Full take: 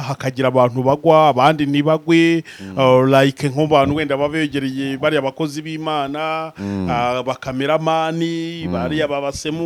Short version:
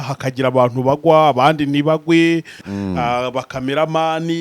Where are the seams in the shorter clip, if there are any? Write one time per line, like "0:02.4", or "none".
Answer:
0:02.6